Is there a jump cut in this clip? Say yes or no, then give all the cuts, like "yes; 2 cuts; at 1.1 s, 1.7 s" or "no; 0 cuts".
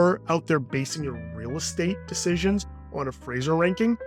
no; 0 cuts